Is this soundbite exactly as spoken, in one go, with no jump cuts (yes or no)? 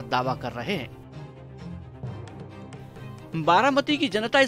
no